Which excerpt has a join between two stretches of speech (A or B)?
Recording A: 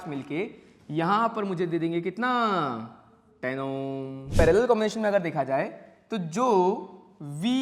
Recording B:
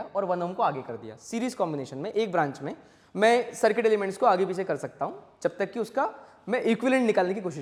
A